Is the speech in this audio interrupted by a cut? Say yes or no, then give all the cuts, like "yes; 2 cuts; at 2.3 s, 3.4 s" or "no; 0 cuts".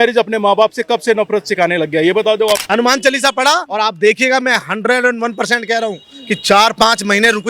yes; 2 cuts; at 2.6 s, 3.7 s